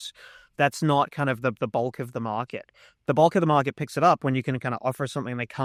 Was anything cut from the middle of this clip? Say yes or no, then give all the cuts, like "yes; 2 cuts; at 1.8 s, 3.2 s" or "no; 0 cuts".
no; 0 cuts